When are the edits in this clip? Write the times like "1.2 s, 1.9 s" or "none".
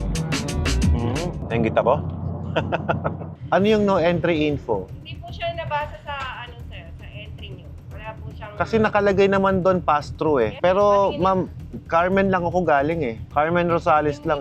3.3 s, 10.5 s